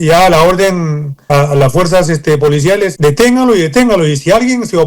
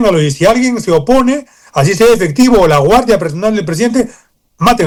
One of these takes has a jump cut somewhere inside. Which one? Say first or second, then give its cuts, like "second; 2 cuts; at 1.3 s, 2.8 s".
first; 2 cuts; at 1.3 s, 2.9 s